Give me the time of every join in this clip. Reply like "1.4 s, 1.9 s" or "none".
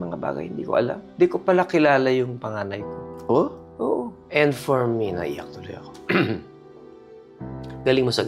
none